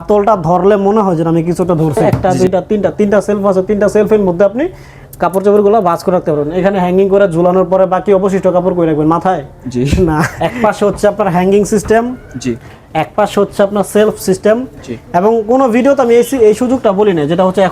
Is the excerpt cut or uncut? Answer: cut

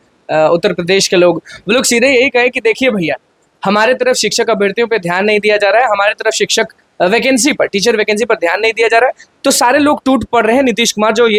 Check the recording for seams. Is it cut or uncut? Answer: uncut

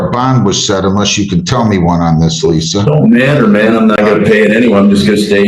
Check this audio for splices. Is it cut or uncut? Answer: uncut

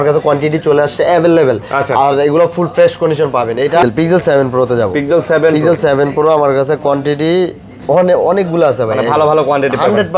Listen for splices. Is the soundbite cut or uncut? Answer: cut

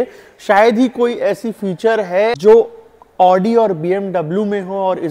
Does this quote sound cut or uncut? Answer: cut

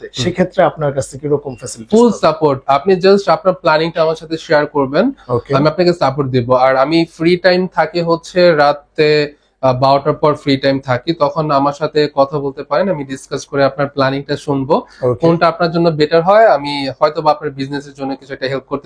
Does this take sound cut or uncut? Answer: uncut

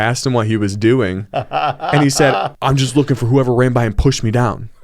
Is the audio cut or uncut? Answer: cut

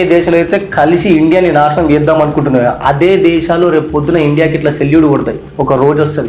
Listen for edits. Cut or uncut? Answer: uncut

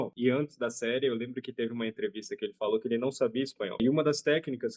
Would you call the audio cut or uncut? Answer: uncut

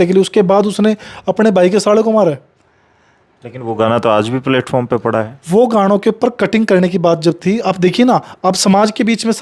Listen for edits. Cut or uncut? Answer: uncut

